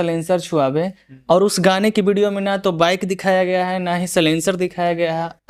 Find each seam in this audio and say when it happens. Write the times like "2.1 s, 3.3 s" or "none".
none